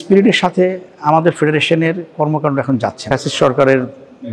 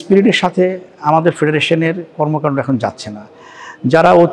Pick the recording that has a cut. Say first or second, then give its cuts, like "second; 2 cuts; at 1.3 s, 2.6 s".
first; 1 cut; at 3.0 s